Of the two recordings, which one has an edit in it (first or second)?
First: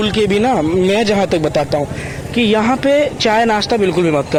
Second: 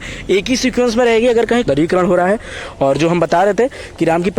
second